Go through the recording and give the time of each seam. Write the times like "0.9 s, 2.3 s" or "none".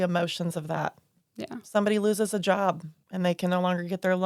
2.9 s